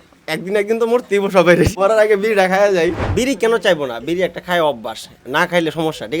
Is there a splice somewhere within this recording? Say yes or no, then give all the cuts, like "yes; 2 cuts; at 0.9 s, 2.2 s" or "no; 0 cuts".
yes; 2 cuts; at 1.7 s, 3.0 s